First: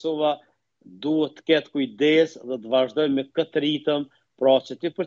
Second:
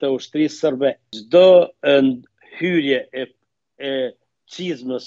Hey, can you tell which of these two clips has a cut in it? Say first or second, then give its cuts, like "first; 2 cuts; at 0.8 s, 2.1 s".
second; 1 cut; at 1.1 s